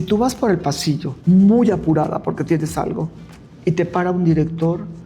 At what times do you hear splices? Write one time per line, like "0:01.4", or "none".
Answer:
0:01.1